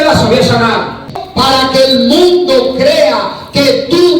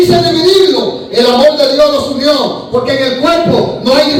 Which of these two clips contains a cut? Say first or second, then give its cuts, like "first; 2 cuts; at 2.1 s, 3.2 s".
first; 1 cut; at 1.2 s